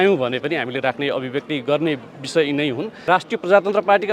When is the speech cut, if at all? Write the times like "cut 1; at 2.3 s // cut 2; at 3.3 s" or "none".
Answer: cut 1; at 3.0 s